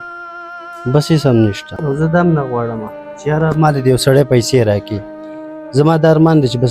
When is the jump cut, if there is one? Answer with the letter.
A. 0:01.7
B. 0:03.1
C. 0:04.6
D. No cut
A